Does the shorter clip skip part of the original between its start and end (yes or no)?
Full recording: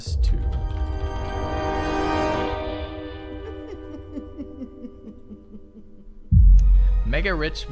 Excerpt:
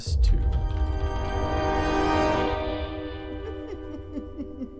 no